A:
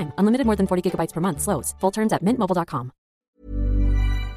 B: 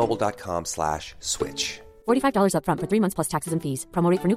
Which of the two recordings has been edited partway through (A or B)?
A